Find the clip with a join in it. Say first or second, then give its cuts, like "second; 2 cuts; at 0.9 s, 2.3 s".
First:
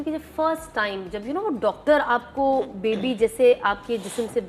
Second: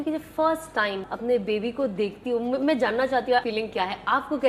second; 2 cuts; at 1.1 s, 3.5 s